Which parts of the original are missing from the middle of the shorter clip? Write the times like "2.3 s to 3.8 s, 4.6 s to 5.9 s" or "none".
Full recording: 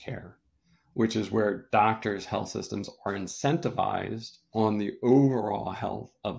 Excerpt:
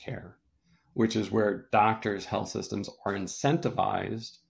none